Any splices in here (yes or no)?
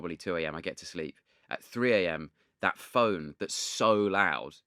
no